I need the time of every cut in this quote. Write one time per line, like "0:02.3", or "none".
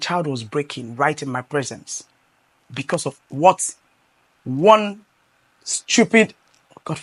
none